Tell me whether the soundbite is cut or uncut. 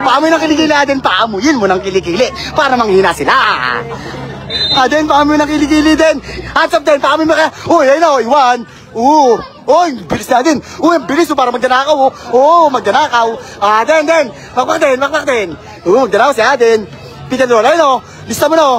uncut